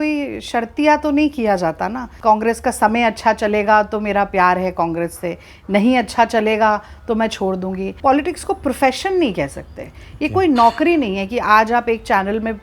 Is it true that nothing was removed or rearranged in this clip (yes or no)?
no